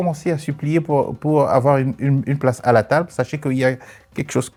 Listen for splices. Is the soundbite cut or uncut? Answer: uncut